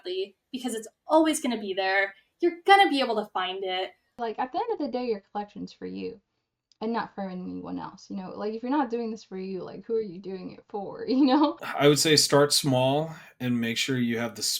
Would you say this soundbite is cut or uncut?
cut